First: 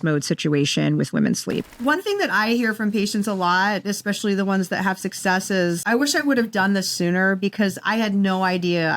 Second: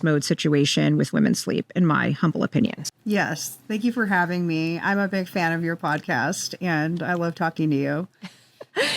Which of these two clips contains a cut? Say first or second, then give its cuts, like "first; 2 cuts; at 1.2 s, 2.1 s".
first; 2 cuts; at 1.7 s, 5.8 s